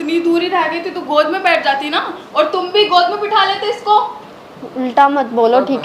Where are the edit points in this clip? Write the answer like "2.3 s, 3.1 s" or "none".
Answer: none